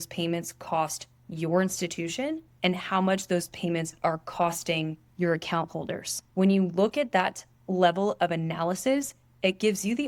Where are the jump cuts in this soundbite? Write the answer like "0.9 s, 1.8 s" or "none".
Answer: 2.5 s, 5.0 s, 6.2 s